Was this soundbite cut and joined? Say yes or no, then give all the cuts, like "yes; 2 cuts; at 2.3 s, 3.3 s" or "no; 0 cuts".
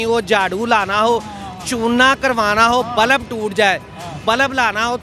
no; 0 cuts